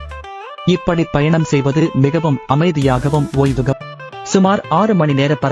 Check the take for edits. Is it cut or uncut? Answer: cut